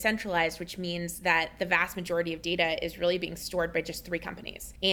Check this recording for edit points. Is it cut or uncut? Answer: uncut